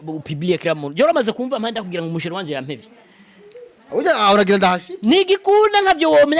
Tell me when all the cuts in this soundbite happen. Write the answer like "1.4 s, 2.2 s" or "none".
none

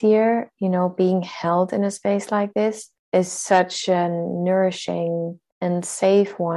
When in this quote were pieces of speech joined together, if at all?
2.9 s, 5.4 s

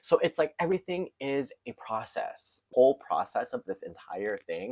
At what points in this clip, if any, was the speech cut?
2.5 s

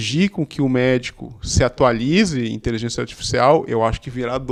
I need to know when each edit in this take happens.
none

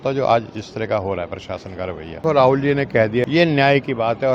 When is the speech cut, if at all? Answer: 2.2 s, 3.3 s

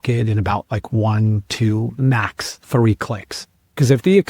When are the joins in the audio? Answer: none

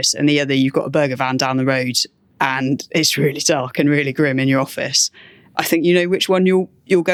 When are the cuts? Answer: none

